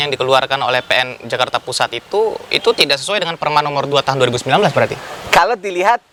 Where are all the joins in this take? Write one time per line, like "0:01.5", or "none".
none